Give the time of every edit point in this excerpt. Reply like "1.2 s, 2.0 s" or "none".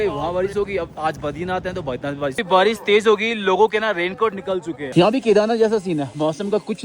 2.4 s, 4.8 s